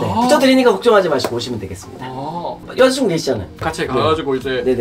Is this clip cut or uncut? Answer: cut